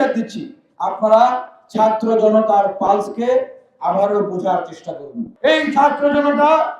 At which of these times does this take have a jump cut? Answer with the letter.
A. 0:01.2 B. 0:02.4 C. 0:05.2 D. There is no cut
C